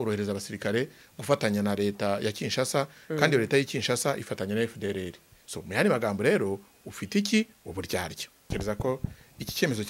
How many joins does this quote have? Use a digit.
1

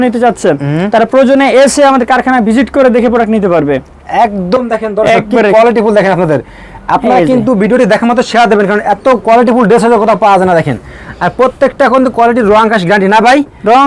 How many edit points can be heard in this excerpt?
0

